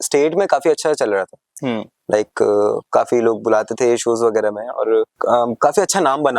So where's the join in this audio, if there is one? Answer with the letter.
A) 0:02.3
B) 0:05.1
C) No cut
B